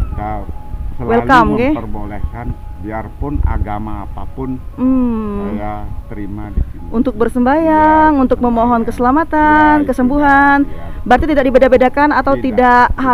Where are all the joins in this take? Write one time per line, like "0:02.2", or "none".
none